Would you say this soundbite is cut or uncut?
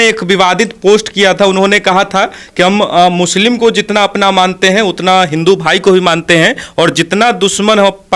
uncut